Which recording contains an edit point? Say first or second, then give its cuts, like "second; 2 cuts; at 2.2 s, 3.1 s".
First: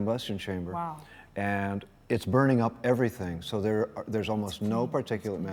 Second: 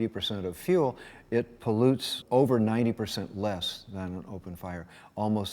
second; 1 cut; at 2.2 s